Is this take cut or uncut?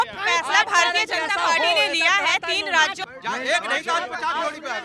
cut